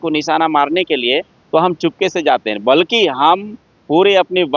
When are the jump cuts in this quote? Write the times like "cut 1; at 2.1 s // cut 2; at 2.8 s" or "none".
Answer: none

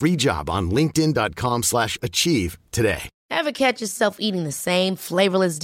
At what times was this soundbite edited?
cut 1; at 3.1 s

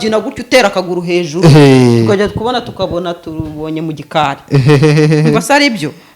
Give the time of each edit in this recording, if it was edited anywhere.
none

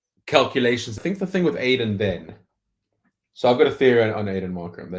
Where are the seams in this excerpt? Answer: cut 1; at 1.0 s

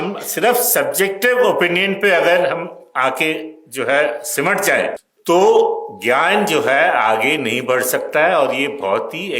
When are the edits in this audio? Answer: cut 1; at 5.1 s

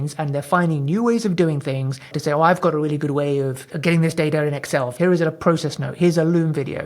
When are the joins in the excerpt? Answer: cut 1; at 2.1 s // cut 2; at 3.7 s // cut 3; at 4.9 s

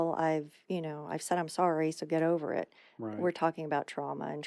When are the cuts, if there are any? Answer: none

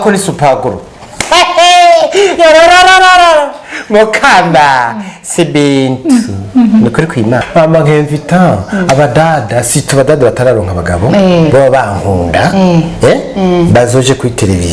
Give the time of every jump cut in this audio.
cut 1; at 7.4 s

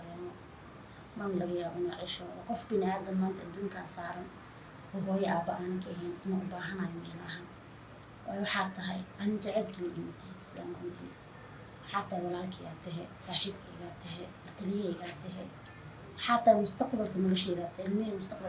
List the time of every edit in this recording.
none

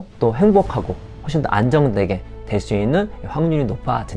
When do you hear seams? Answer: none

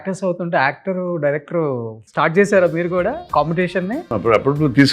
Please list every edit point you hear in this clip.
cut 1; at 2.0 s // cut 2; at 3.2 s // cut 3; at 4.1 s

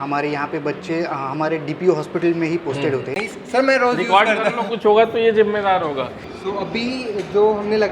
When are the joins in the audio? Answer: cut 1; at 3.2 s // cut 2; at 6.2 s

